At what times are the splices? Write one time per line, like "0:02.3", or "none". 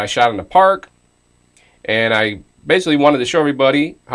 0:02.3